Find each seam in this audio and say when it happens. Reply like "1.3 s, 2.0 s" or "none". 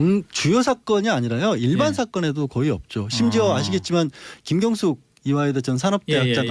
1.2 s

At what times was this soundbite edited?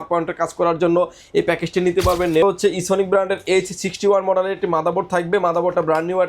2.4 s

